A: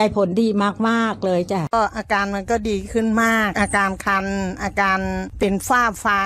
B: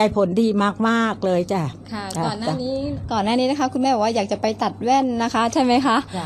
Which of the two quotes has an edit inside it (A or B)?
A